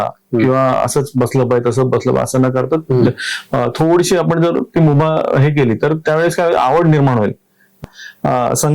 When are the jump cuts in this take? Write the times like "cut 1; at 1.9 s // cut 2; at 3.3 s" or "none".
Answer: cut 1; at 7.8 s